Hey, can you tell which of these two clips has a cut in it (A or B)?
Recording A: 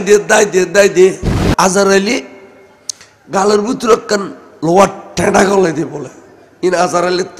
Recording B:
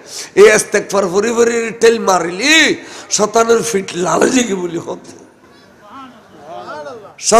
A